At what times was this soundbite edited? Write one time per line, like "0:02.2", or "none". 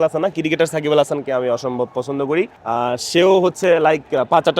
0:02.6